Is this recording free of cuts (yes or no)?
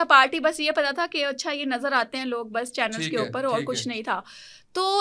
yes